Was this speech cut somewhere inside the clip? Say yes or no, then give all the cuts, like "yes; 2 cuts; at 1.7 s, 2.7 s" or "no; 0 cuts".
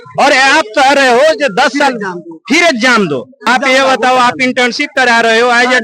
yes; 1 cut; at 3.4 s